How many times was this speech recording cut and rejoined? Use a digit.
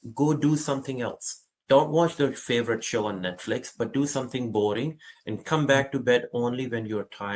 0